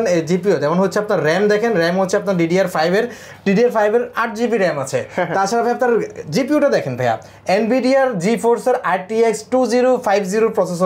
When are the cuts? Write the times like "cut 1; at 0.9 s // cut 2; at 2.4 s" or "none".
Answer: none